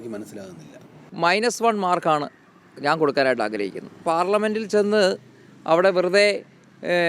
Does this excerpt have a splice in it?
yes; 2 cuts; at 1.1 s, 4.0 s

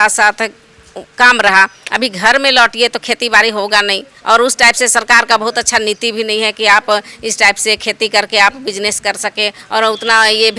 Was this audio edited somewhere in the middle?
no; 0 cuts

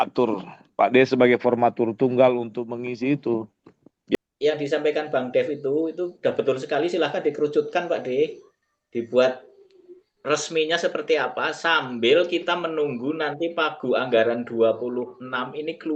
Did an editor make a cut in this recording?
yes; 1 cut; at 4.2 s

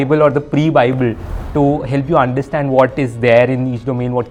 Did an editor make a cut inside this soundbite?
no; 0 cuts

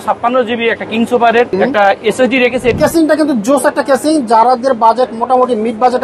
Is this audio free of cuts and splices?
no; 2 cuts; at 1.5 s, 2.8 s

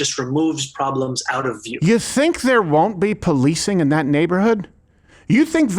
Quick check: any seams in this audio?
yes; 1 cut; at 1.7 s

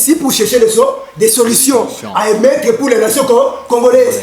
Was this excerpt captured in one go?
yes; 0 cuts

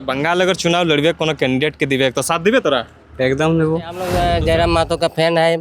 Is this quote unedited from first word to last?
no; 1 cut; at 4.0 s

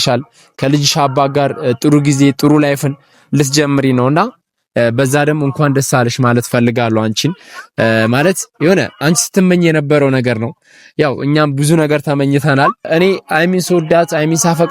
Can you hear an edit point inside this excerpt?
yes; 1 cut; at 12.9 s

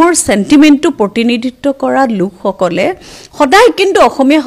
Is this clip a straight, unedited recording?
yes; 0 cuts

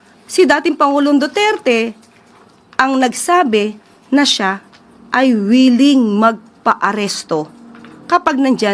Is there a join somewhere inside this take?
no; 0 cuts

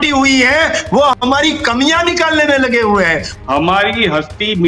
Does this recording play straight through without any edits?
no; 1 cut; at 3.3 s

